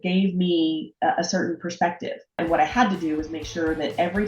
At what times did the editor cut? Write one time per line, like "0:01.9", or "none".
0:02.4